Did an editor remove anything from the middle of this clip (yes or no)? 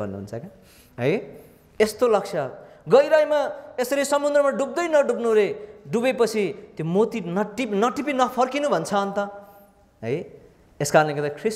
no